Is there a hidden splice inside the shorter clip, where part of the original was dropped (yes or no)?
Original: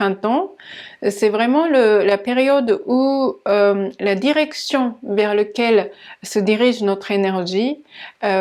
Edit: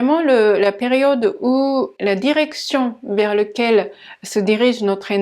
yes